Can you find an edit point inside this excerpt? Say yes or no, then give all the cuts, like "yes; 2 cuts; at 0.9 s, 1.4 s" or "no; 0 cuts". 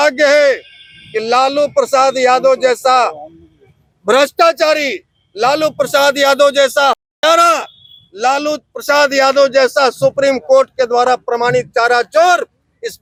no; 0 cuts